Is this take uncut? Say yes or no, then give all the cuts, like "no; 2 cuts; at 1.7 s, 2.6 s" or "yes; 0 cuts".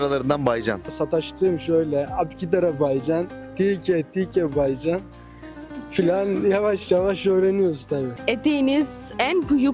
no; 2 cuts; at 1.0 s, 8.2 s